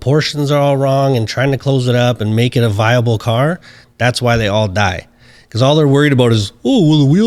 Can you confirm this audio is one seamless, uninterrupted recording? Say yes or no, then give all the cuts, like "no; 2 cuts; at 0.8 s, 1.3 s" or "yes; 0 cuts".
yes; 0 cuts